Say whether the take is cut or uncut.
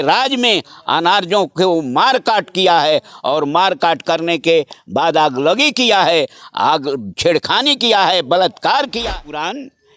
cut